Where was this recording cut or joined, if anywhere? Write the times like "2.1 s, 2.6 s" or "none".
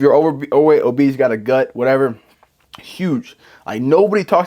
none